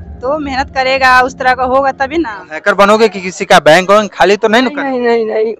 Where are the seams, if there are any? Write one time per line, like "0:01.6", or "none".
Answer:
0:02.5